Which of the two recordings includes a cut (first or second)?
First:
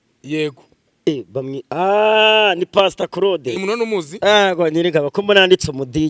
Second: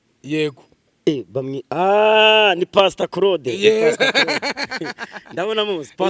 first